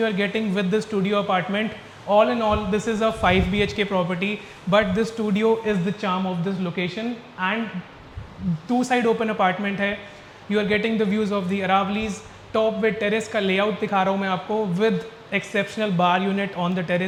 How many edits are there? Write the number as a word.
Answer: zero